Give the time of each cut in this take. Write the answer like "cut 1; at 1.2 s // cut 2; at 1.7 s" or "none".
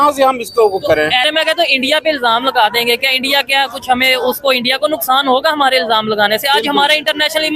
cut 1; at 1.3 s

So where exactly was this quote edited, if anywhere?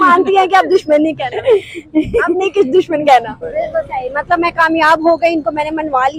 cut 1; at 3.3 s

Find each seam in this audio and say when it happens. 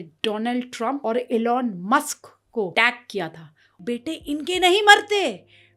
cut 1; at 1.0 s // cut 2; at 2.7 s // cut 3; at 3.8 s

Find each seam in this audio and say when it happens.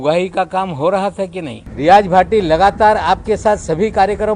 cut 1; at 1.6 s

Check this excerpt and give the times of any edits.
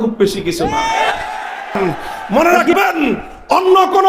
cut 1; at 1.8 s

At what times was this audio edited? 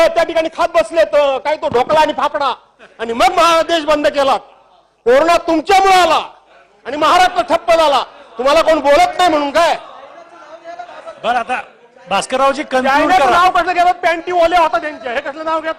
none

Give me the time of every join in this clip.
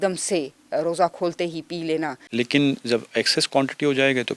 cut 1; at 2.2 s

